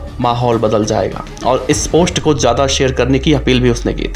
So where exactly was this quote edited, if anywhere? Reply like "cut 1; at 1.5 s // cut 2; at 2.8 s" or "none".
none